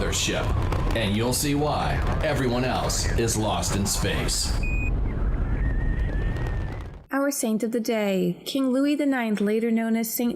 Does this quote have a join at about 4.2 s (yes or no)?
no